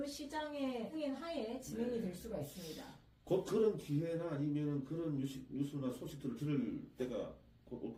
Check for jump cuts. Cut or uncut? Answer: uncut